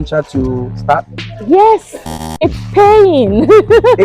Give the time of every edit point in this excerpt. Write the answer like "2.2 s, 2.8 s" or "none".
2.3 s